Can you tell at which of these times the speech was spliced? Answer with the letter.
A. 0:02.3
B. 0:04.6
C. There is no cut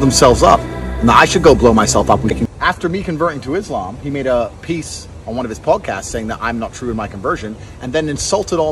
A